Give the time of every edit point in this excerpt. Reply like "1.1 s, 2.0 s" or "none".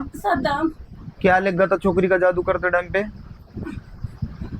none